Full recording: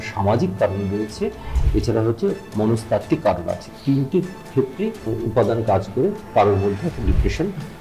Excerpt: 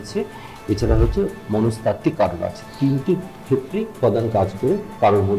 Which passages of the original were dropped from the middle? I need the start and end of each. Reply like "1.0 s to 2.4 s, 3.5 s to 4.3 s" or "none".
5.0 s to 5.3 s